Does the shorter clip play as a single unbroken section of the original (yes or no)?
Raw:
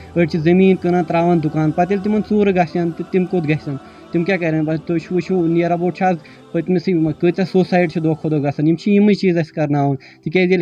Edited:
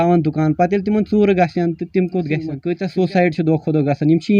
no